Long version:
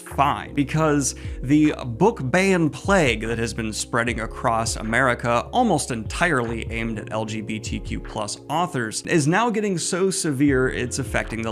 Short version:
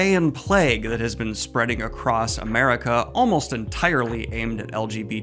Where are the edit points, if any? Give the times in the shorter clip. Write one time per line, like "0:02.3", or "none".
none